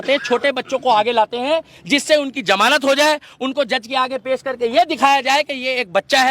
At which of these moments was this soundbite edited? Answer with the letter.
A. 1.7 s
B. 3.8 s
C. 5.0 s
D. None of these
D